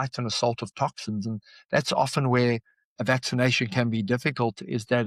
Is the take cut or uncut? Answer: uncut